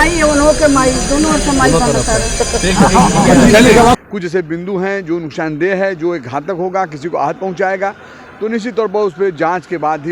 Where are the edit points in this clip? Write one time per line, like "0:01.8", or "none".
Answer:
0:04.0